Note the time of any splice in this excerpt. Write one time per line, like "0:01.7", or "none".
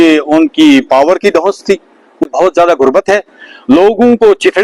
0:02.3

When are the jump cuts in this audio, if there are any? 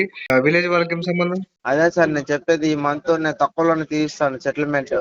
0:01.5

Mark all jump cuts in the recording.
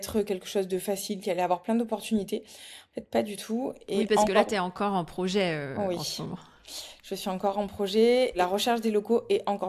none

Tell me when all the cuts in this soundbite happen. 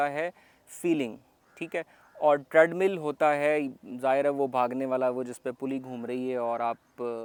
none

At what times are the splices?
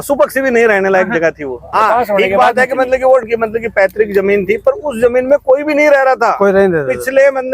0:01.8

